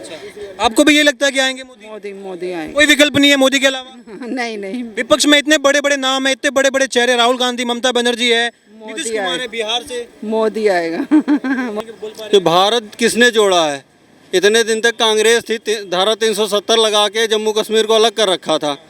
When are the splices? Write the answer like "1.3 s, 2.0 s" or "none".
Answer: 11.7 s